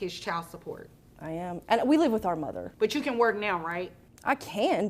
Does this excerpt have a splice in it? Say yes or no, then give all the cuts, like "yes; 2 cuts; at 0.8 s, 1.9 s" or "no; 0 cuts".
yes; 1 cut; at 2.7 s